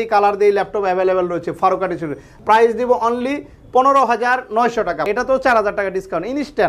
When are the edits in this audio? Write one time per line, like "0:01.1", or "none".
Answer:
0:02.3
0:05.1